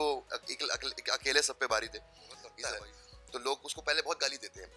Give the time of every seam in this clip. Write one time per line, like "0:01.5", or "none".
0:02.5